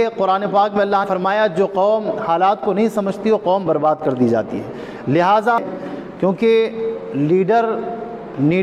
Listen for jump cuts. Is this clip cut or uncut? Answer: cut